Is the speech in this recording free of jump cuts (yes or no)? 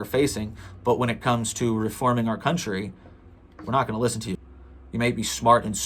no